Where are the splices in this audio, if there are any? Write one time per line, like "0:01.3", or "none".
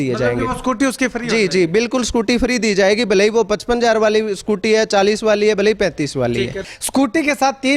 0:06.7